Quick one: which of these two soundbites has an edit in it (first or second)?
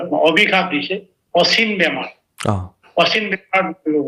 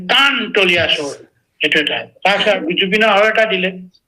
second